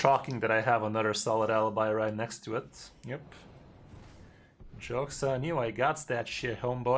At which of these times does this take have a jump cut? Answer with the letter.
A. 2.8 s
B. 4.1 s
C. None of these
A